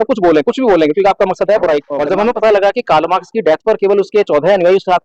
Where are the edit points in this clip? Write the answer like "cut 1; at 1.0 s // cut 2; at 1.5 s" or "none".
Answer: cut 1; at 2.0 s